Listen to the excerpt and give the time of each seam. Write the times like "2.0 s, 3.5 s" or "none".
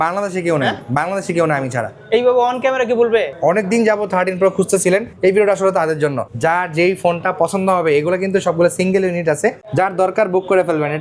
3.3 s, 5.1 s, 6.2 s, 9.6 s